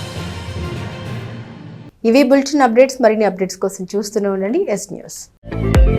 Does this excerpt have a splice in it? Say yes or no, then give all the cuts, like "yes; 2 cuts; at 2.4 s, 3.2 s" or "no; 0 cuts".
no; 0 cuts